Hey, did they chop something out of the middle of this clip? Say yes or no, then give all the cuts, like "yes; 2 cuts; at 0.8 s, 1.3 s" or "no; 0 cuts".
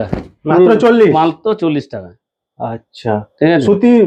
no; 0 cuts